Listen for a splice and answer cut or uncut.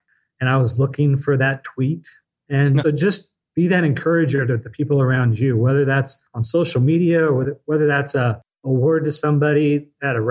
cut